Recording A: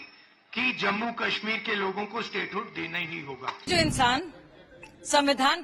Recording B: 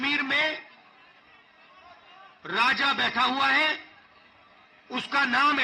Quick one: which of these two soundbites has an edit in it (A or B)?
A